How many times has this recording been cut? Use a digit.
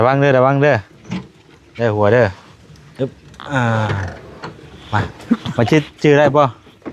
0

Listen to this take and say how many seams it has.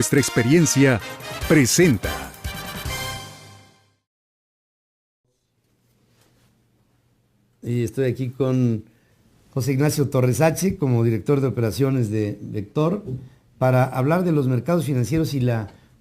1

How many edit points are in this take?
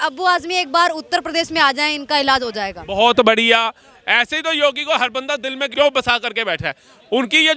1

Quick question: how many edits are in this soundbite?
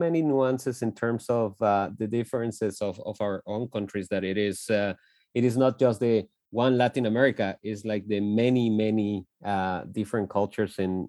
0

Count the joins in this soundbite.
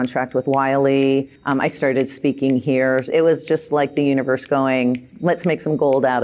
2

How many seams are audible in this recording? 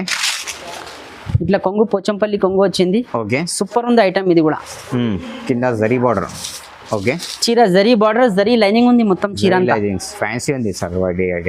0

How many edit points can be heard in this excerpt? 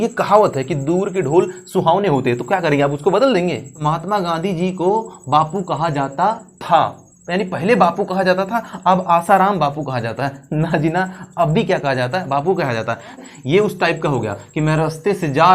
2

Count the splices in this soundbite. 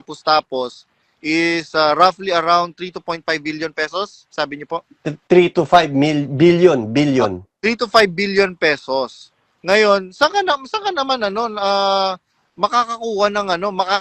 0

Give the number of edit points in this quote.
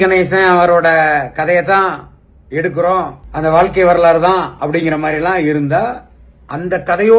1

